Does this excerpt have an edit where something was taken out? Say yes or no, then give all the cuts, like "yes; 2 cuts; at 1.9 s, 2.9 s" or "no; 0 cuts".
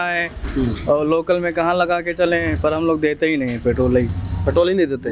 no; 0 cuts